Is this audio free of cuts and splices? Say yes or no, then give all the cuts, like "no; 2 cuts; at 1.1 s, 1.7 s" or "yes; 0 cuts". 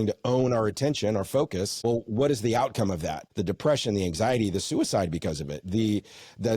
no; 2 cuts; at 1.7 s, 3.2 s